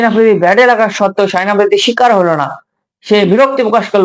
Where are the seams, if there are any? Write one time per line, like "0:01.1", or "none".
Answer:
none